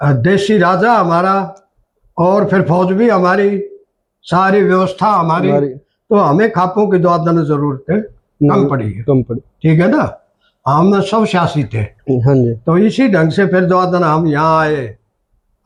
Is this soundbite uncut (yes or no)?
yes